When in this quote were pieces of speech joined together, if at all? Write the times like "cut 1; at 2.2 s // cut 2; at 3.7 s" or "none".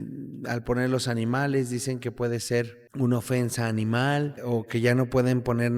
cut 1; at 2.8 s // cut 2; at 4.4 s